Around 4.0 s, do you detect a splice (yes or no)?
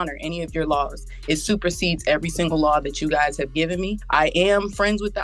yes